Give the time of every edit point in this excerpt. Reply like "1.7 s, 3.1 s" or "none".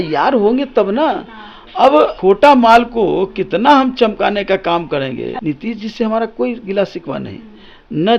2.2 s, 5.3 s